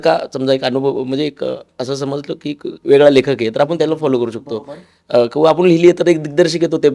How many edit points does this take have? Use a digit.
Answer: 0